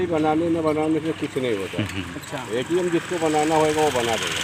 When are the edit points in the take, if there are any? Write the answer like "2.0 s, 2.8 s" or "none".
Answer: none